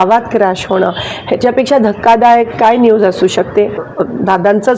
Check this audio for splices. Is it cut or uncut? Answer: cut